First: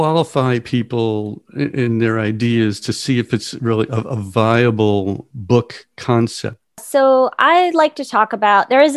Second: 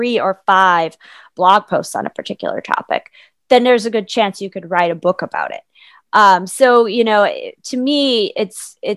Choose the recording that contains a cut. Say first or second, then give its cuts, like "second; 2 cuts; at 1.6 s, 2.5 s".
first; 2 cuts; at 5.3 s, 6.8 s